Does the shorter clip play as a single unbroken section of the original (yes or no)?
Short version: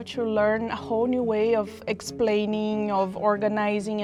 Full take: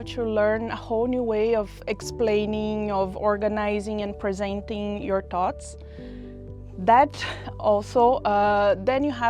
yes